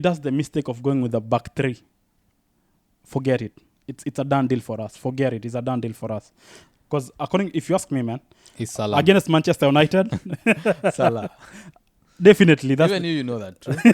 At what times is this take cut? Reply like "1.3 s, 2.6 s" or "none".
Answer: 6.8 s